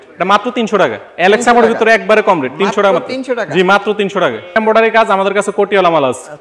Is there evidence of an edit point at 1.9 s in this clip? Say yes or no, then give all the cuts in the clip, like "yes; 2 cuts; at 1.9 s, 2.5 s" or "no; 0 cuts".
no; 1 cut; at 4.6 s